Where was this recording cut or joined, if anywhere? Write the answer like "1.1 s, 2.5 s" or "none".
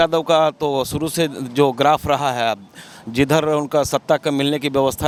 none